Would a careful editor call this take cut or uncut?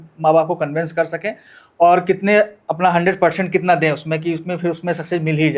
uncut